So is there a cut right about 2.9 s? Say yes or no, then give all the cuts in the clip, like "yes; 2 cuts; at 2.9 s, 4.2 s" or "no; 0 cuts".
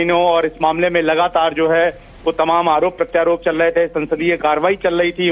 no; 0 cuts